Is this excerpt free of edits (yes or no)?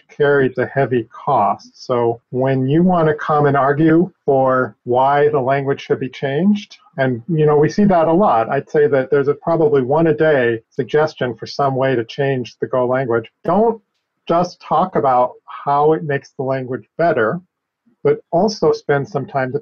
no